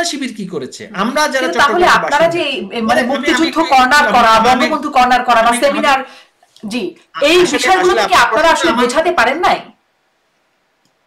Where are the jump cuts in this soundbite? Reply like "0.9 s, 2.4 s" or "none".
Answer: none